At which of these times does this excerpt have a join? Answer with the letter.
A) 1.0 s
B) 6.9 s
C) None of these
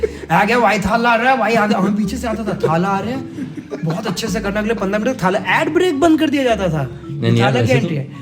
C